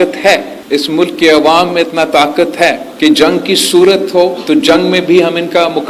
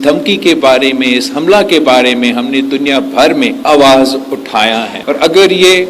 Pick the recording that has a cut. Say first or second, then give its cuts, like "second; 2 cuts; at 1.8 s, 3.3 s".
second; 1 cut; at 4.9 s